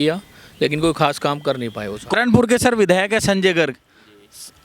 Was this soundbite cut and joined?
yes; 1 cut; at 2.1 s

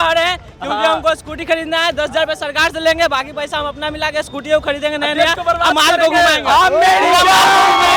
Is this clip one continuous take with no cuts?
yes; 0 cuts

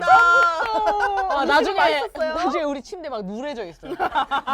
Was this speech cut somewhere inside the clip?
no; 0 cuts

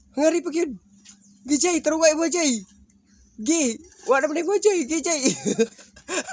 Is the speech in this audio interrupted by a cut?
yes; 1 cut; at 5.1 s

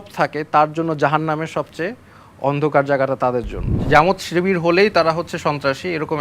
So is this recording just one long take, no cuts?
no; 1 cut; at 3.8 s

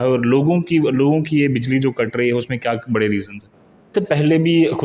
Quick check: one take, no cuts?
no; 1 cut; at 3.9 s

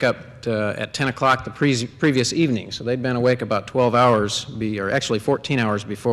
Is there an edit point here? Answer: yes; 1 cut; at 2.1 s

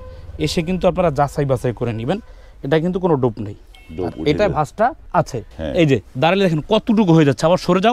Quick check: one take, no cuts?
no; 1 cut; at 5.4 s

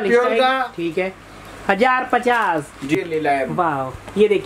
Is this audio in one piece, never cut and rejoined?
no; 1 cut; at 2.9 s

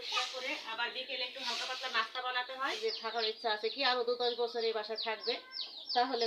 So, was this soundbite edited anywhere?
yes; 1 cut; at 2.8 s

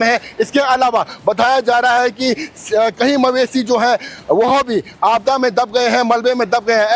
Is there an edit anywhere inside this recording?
yes; 1 cut; at 2.2 s

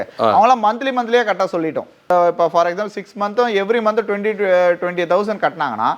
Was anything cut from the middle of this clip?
yes; 1 cut; at 2.1 s

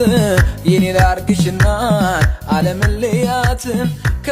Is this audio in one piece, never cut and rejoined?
yes; 0 cuts

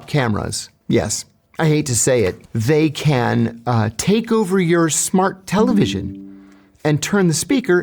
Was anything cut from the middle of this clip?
yes; 1 cut; at 2.5 s

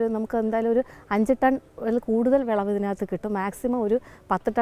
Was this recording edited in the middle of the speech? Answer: no; 0 cuts

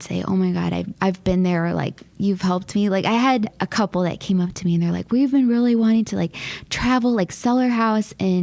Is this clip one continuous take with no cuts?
no; 2 cuts; at 0.9 s, 3.6 s

